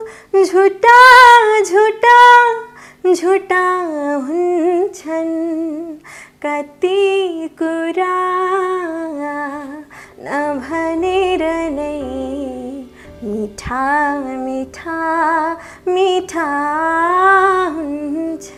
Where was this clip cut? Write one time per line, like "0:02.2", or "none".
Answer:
none